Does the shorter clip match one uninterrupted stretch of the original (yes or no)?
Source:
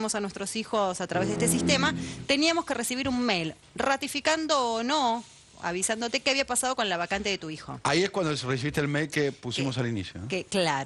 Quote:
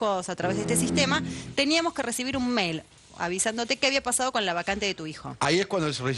no